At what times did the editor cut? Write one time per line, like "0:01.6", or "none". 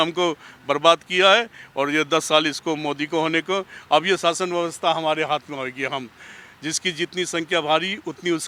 none

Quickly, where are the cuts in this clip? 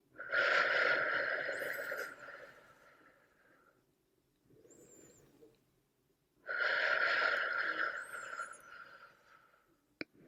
none

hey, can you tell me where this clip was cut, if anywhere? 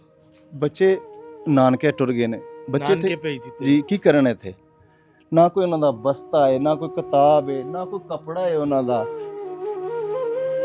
0:09.1

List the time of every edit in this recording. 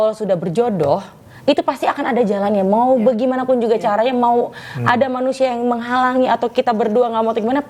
none

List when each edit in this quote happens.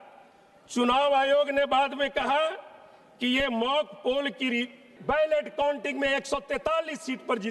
0:04.8

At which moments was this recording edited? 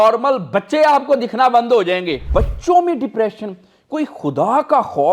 0:02.2

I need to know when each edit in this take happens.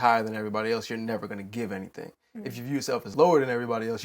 0:03.1

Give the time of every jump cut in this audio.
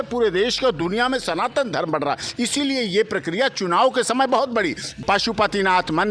0:05.0

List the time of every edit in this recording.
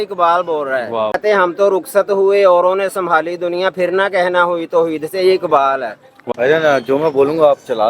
0:01.2
0:06.1

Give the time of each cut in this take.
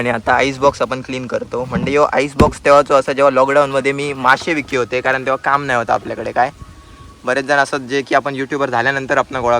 none

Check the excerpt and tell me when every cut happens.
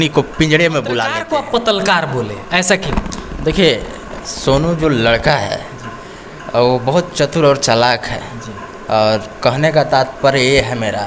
0:01.1

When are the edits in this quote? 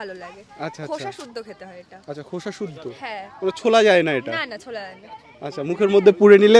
none

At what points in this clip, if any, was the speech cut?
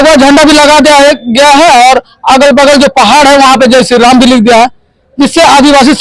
none

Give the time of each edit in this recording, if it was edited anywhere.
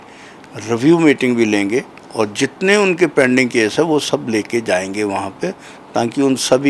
none

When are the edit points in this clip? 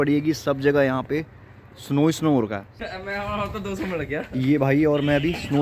0:02.7

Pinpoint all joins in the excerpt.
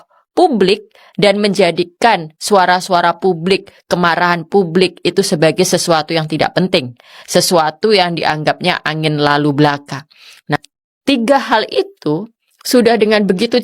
0:10.6

